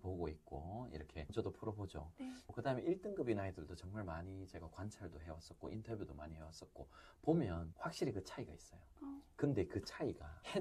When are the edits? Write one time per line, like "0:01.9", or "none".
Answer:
none